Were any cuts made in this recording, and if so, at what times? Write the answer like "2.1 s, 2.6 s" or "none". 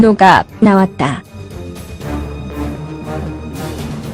none